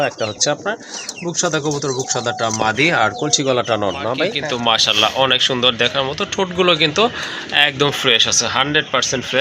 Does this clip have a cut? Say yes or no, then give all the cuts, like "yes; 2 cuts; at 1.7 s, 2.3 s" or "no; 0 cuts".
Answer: yes; 1 cut; at 4.4 s